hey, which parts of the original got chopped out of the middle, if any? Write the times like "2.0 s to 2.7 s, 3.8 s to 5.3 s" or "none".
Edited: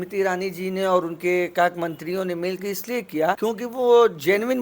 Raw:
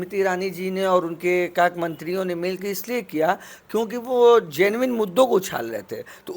3.4 s to 3.7 s